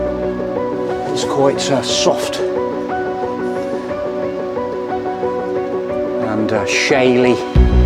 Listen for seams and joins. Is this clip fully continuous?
yes; 0 cuts

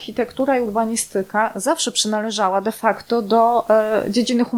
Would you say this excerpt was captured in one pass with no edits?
yes; 0 cuts

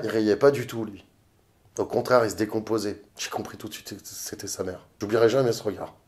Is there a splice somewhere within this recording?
yes; 2 cuts; at 3.1 s, 5.0 s

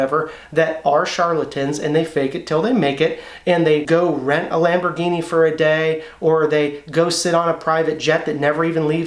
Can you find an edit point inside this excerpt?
yes; 1 cut; at 3.8 s

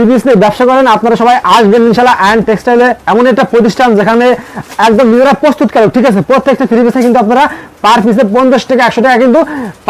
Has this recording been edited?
no; 0 cuts

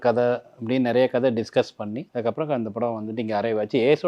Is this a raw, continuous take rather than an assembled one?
no; 1 cut; at 2.0 s

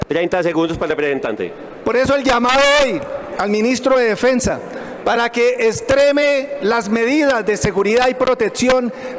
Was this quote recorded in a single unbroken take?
yes; 0 cuts

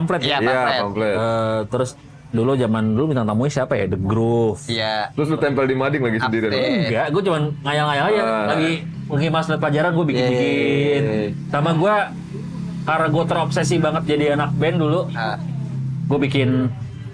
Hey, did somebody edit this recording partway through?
no; 0 cuts

